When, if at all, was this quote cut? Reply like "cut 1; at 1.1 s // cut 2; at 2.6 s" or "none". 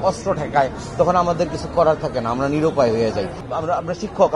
cut 1; at 3.5 s